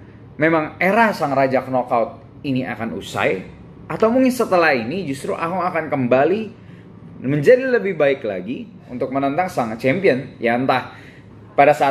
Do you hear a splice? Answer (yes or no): yes